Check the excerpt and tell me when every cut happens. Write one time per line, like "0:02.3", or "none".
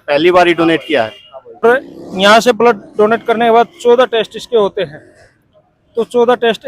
0:01.6